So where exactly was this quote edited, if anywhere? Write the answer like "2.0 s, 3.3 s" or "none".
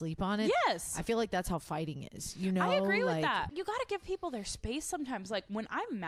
3.5 s